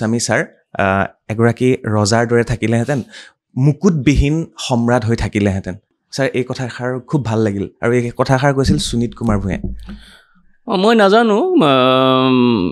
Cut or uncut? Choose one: uncut